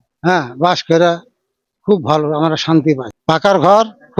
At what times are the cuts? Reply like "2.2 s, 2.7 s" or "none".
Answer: 3.1 s